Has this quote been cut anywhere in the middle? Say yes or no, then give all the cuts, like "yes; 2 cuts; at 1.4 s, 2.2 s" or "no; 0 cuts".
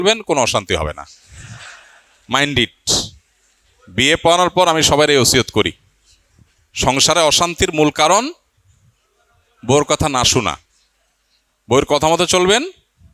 no; 0 cuts